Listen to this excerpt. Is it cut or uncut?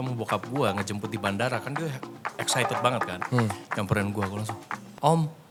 uncut